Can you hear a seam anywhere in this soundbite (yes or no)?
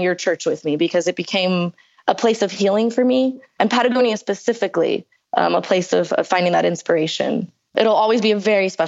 yes